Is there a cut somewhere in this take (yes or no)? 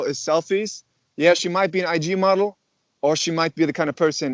no